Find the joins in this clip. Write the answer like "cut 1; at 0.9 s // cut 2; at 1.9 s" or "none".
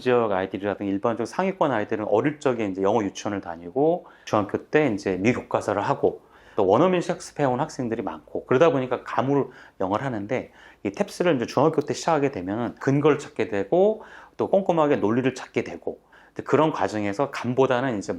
cut 1; at 4.1 s // cut 2; at 6.5 s // cut 3; at 12.8 s